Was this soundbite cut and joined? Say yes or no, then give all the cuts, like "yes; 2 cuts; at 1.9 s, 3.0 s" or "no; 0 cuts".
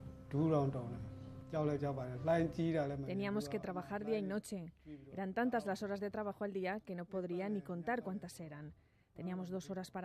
no; 0 cuts